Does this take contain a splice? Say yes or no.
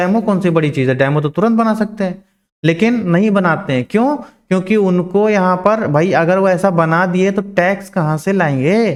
no